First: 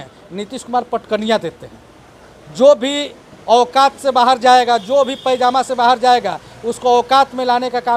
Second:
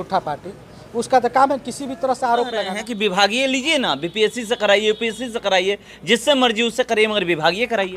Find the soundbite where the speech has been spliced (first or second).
second